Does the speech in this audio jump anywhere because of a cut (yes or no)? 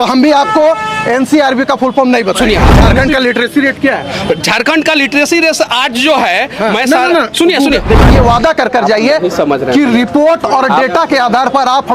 yes